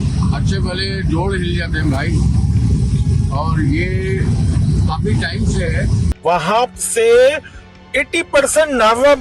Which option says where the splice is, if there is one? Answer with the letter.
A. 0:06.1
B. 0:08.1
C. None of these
A